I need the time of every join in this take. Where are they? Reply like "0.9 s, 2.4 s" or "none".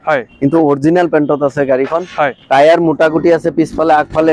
none